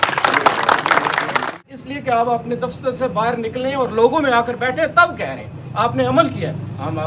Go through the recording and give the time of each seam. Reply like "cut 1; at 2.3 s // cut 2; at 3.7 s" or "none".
cut 1; at 1.6 s